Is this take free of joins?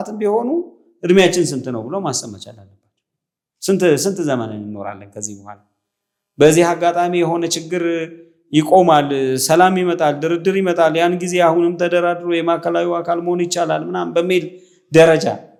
yes; 0 cuts

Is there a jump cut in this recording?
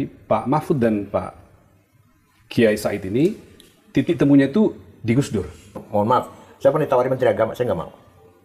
yes; 1 cut; at 5.8 s

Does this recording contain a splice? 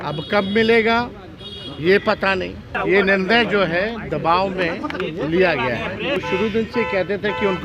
yes; 2 cuts; at 2.8 s, 6.2 s

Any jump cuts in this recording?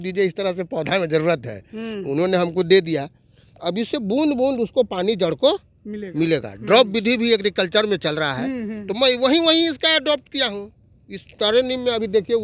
no; 0 cuts

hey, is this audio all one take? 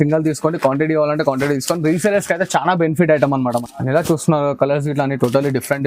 no; 1 cut; at 3.5 s

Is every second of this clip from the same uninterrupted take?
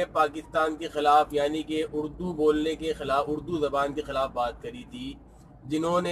yes; 0 cuts

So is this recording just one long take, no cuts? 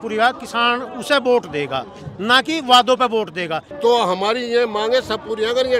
no; 1 cut; at 3.6 s

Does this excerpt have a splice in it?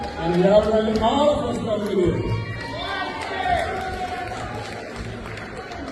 no; 0 cuts

